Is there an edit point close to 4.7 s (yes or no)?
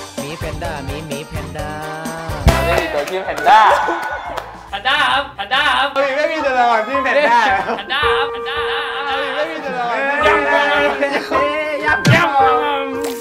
yes